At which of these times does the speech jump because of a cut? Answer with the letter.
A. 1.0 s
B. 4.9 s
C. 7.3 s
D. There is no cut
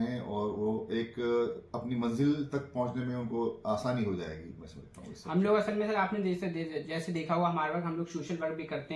D